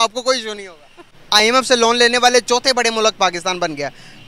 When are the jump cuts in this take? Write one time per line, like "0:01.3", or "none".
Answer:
0:01.2